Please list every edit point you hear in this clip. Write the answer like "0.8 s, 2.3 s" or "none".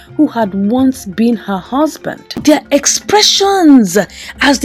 2.4 s